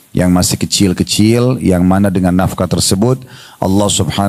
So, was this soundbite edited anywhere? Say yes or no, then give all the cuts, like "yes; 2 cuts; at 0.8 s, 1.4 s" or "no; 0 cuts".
no; 0 cuts